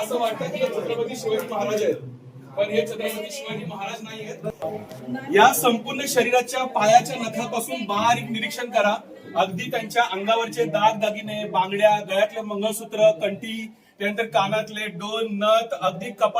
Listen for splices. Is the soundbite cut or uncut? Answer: cut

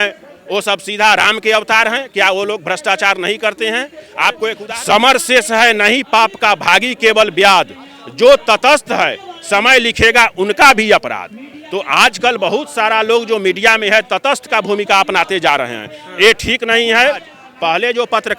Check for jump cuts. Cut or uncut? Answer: cut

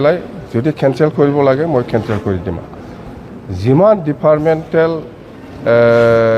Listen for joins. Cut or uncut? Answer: cut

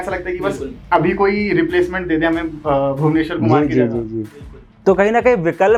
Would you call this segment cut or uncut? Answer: uncut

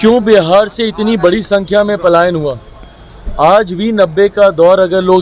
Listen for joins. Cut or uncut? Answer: uncut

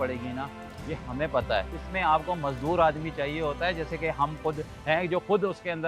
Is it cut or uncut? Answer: cut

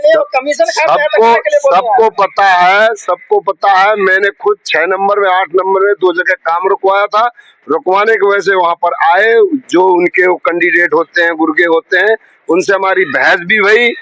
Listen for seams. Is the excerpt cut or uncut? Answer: uncut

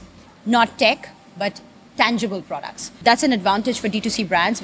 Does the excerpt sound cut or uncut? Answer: cut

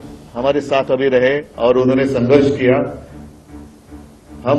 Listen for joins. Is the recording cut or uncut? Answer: uncut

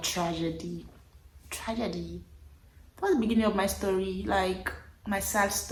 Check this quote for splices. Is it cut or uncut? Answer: uncut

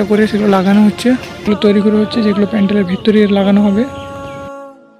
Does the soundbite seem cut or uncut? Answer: cut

